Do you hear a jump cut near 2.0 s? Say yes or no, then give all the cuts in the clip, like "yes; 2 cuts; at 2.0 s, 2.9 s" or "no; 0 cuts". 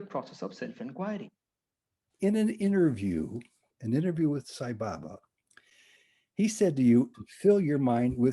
yes; 2 cuts; at 2.0 s, 7.1 s